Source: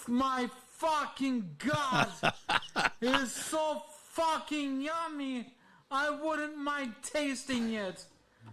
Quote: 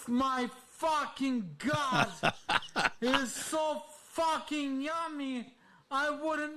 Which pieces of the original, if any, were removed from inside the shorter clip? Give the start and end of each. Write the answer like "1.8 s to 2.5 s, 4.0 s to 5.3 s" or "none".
none